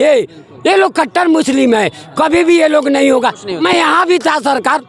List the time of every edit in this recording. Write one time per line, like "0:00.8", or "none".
none